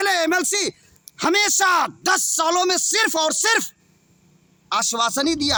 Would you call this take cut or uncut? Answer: uncut